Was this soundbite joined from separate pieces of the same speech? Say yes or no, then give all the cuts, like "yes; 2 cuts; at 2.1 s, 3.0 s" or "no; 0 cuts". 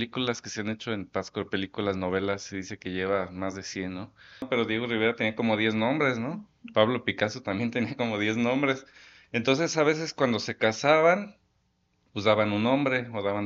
yes; 1 cut; at 4.5 s